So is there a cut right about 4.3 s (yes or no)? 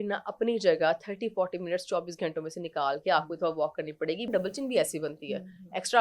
yes